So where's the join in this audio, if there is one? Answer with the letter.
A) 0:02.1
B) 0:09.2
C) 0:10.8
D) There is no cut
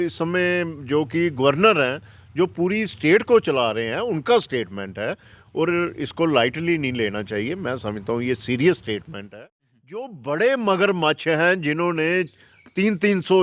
B